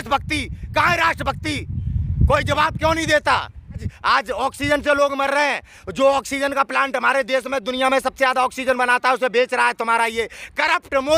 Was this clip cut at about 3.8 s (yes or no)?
yes